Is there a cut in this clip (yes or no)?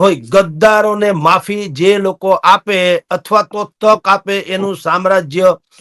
no